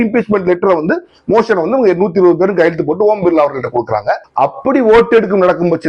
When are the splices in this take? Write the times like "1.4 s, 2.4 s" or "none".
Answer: 4.3 s